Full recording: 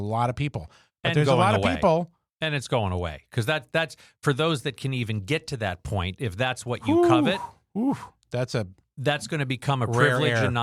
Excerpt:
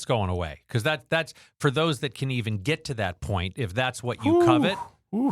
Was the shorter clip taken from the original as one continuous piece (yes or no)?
yes